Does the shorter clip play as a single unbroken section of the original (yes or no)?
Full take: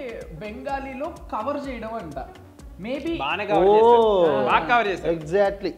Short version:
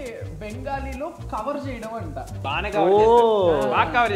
no